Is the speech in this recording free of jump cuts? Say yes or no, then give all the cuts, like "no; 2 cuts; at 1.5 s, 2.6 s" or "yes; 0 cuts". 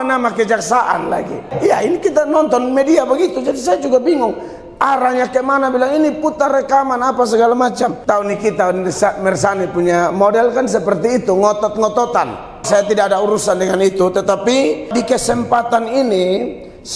no; 4 cuts; at 1.5 s, 8.0 s, 12.6 s, 14.9 s